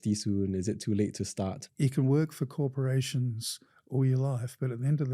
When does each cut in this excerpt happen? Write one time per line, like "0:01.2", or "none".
0:01.7